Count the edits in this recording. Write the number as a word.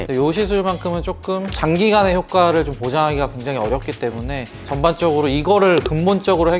one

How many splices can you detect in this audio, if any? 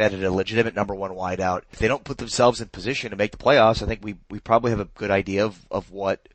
one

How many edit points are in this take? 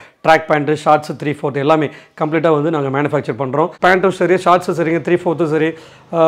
one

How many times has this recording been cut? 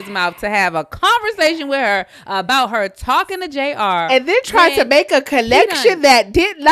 zero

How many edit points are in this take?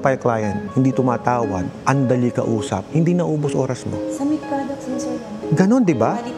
zero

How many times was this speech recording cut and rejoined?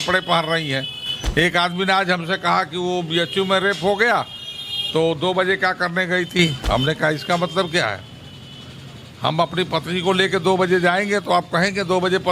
zero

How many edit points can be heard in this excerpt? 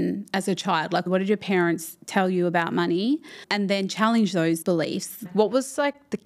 three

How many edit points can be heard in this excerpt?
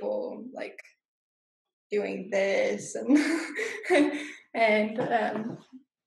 zero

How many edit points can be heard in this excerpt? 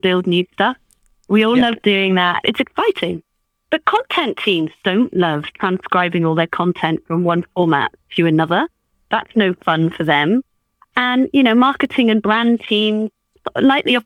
two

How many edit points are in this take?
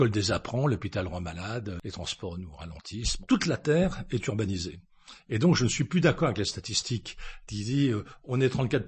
two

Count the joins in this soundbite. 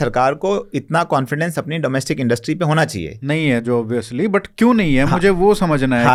zero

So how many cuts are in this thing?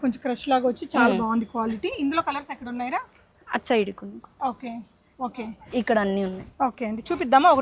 zero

